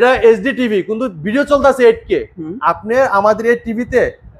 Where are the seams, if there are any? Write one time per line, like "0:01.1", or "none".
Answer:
none